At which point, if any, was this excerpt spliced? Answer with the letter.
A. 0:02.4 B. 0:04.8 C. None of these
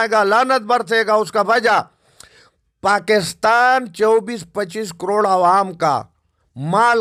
C